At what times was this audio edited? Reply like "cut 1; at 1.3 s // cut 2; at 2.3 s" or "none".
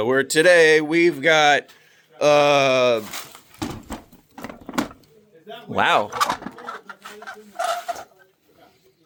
none